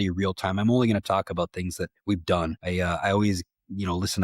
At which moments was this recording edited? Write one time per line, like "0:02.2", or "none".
0:02.6